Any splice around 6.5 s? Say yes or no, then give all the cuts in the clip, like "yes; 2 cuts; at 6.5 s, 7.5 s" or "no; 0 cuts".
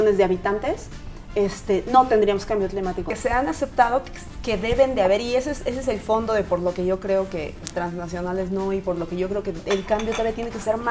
no; 1 cut; at 3.1 s